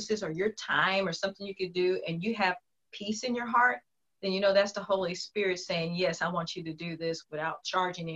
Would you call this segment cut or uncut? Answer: uncut